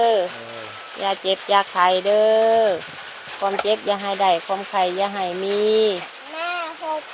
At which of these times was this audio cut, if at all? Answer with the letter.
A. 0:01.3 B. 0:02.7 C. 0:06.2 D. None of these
C